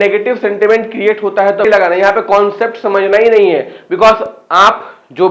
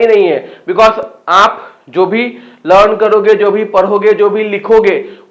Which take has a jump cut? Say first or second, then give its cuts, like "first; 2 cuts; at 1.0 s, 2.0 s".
first; 1 cut; at 1.7 s